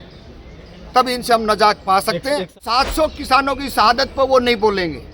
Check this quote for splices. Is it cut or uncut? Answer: cut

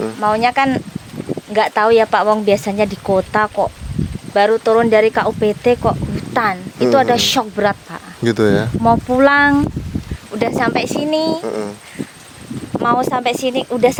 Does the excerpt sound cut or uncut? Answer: uncut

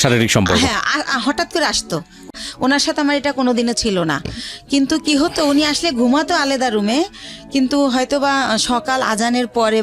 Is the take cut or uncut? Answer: cut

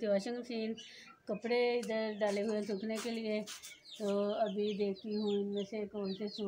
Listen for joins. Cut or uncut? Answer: uncut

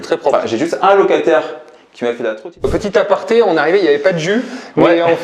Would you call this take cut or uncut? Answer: cut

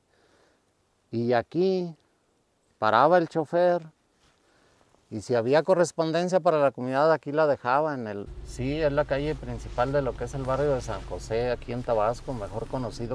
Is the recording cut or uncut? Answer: cut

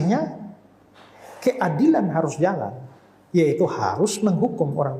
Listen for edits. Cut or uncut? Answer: uncut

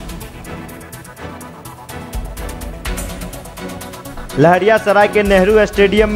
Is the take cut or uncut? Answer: uncut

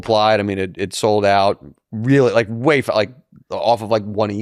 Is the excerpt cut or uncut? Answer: uncut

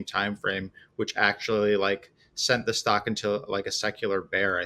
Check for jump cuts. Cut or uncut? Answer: uncut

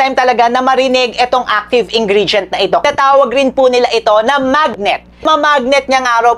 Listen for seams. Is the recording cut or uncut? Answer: cut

